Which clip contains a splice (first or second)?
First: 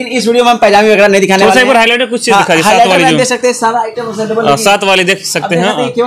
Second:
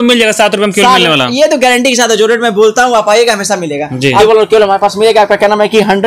second